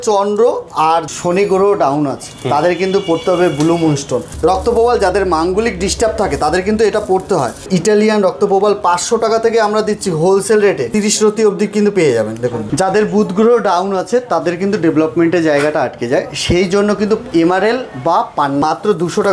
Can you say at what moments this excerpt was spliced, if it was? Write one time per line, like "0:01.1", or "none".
0:01.1
0:04.3
0:07.7
0:10.9
0:12.6
0:18.6